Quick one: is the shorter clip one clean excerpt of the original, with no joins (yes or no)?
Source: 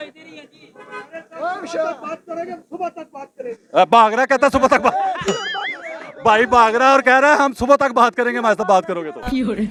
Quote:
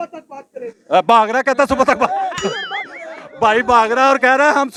yes